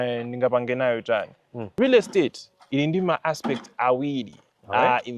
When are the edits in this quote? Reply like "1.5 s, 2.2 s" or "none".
1.7 s